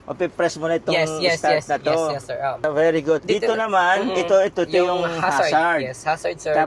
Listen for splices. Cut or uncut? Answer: uncut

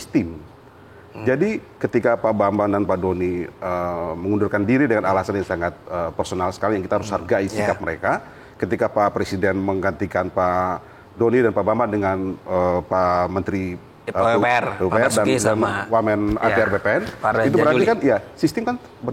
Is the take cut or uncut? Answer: uncut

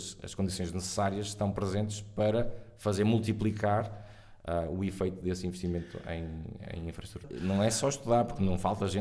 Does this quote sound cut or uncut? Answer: cut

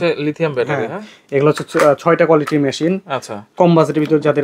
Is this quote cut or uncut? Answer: uncut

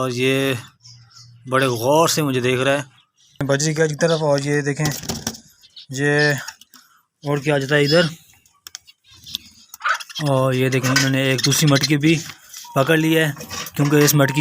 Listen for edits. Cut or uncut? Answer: cut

